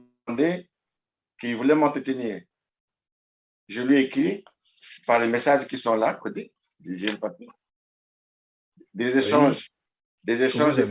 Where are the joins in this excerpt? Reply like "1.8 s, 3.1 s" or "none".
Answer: none